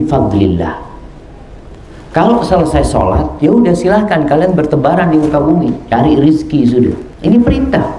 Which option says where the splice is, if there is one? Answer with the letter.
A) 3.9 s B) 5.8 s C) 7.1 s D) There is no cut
C